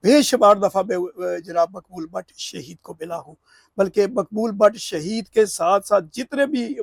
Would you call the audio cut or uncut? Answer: uncut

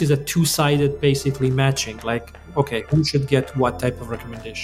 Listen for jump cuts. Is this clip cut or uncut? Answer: uncut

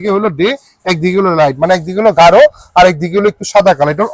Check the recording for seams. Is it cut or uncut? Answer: uncut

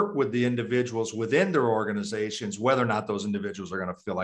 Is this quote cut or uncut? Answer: uncut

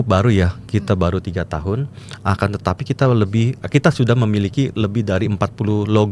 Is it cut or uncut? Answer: uncut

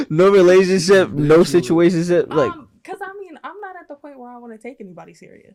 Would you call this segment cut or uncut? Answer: uncut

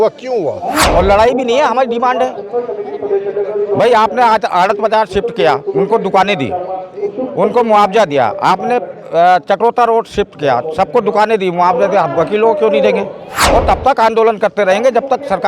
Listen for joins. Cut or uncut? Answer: cut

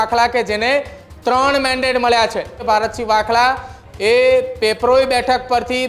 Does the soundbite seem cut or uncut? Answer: cut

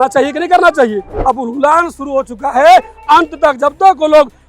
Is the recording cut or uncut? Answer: cut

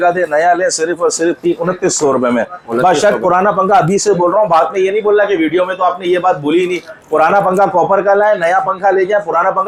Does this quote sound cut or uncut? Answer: uncut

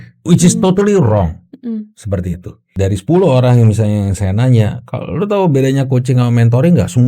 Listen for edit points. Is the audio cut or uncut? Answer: cut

